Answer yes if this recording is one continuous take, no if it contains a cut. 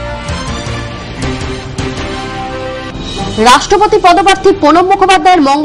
yes